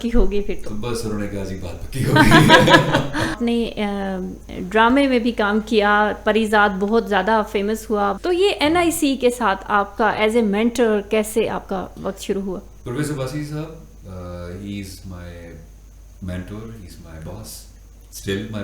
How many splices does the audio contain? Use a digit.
3